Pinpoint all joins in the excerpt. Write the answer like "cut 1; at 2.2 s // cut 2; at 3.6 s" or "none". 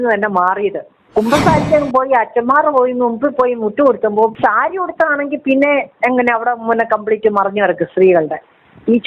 cut 1; at 1.0 s // cut 2; at 4.3 s